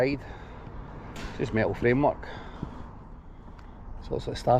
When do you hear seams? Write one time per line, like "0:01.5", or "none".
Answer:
none